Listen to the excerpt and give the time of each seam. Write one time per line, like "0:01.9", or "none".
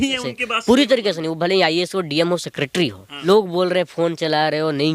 0:03.1